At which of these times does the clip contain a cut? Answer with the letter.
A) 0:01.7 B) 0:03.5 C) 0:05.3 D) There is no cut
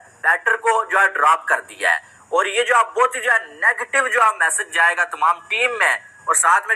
D